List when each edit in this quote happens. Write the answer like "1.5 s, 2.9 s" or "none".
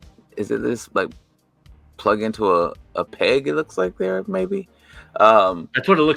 none